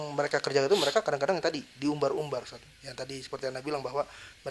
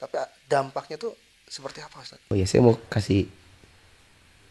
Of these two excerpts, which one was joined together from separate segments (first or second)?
second